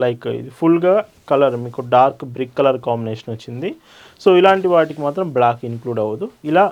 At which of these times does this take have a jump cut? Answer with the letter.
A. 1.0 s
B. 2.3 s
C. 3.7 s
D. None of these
D